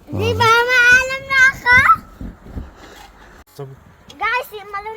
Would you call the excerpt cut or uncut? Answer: cut